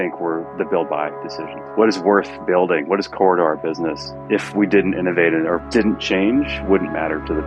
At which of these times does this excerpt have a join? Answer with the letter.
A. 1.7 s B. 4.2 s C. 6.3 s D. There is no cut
D